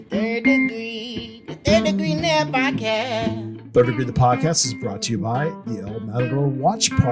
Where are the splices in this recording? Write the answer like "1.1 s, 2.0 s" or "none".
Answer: 3.5 s